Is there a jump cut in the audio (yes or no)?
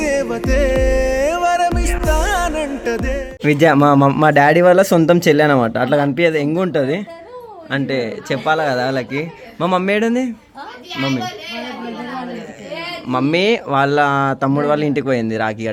no